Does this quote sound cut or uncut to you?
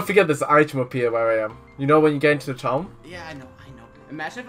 cut